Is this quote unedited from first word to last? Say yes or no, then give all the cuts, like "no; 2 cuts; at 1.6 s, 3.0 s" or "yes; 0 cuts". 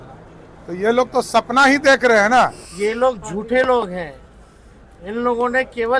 no; 1 cut; at 2.6 s